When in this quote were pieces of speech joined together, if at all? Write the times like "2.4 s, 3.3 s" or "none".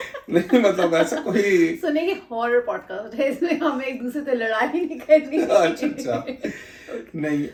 none